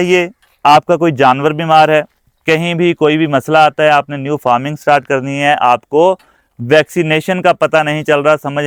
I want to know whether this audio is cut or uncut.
uncut